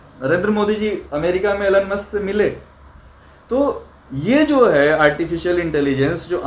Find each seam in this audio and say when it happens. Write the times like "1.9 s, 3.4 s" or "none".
none